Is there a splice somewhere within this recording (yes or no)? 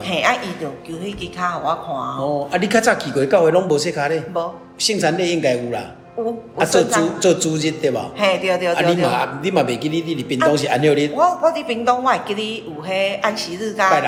no